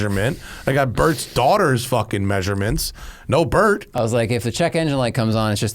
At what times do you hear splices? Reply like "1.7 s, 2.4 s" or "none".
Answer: 3.9 s